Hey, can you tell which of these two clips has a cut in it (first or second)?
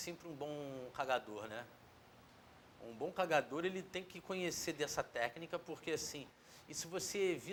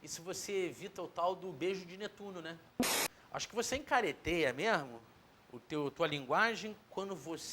second